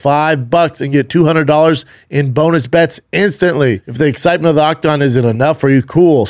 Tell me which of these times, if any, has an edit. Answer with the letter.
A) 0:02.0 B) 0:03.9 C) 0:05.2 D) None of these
B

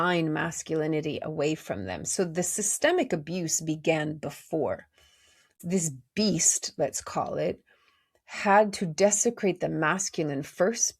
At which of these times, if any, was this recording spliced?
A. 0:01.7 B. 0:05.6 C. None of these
B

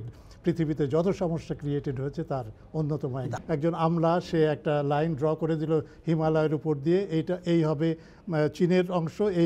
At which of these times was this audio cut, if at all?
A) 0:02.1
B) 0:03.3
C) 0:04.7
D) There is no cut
B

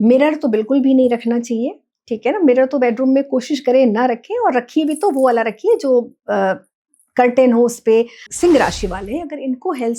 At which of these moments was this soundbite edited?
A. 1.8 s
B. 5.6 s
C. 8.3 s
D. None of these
C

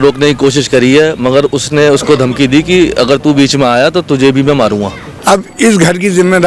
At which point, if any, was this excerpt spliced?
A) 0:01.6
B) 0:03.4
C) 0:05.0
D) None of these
C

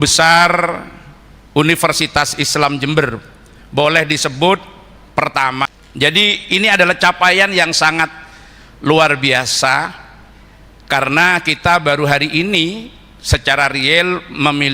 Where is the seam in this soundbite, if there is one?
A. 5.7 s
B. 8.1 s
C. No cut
A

